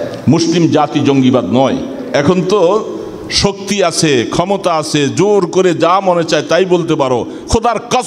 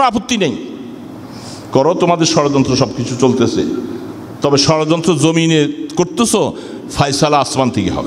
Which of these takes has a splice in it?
first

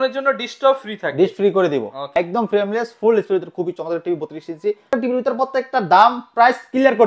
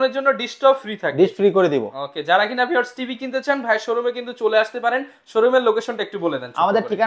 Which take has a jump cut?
first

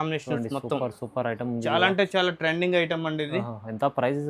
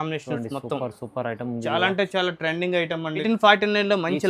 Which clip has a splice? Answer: second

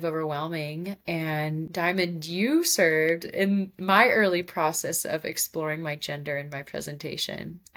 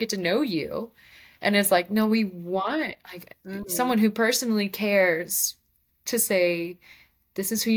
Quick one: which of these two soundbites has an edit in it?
first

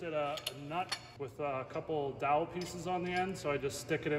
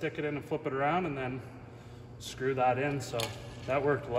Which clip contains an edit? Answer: first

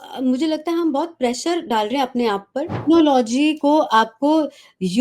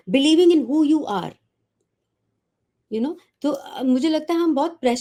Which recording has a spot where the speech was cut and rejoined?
first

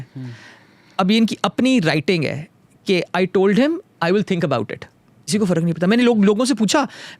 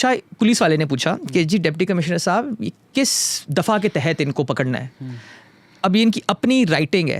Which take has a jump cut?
first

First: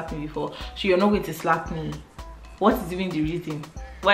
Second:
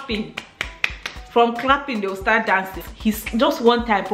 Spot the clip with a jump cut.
second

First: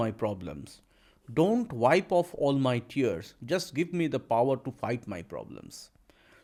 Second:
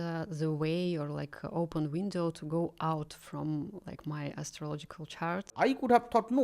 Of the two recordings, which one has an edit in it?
second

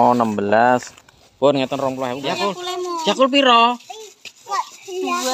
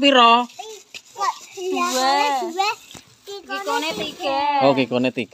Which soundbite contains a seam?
first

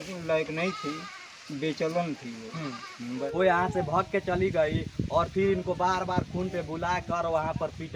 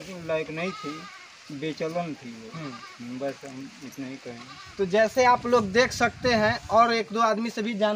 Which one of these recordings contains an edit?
first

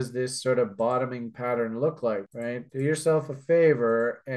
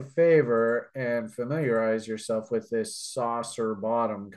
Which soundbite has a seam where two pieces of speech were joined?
first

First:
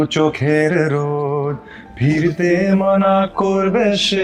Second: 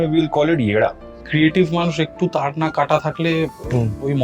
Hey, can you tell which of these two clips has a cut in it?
second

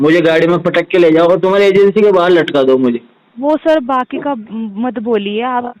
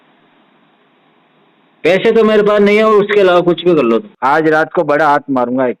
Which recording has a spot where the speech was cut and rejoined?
second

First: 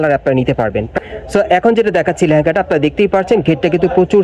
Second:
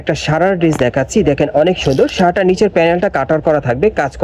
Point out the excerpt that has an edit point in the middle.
first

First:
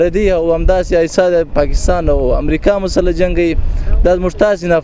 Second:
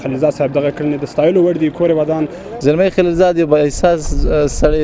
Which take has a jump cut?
second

